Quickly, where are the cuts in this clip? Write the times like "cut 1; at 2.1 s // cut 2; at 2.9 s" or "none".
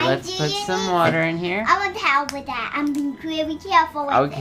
cut 1; at 1.5 s